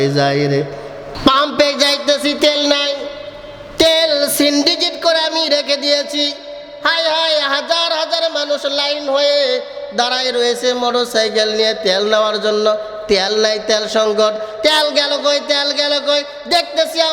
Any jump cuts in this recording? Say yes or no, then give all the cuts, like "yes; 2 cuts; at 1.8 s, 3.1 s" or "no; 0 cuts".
yes; 1 cut; at 1.0 s